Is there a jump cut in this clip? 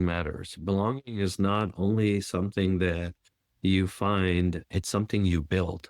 no; 0 cuts

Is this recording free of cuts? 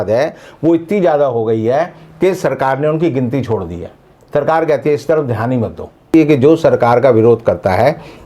no; 1 cut; at 6.1 s

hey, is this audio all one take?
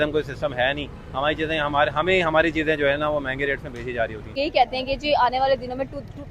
no; 1 cut; at 4.4 s

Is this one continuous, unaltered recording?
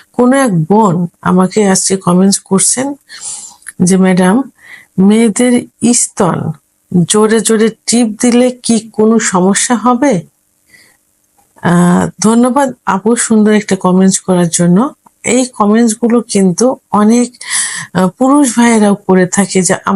yes; 0 cuts

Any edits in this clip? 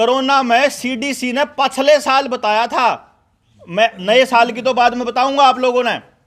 no; 0 cuts

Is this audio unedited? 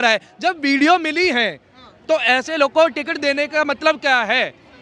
yes; 0 cuts

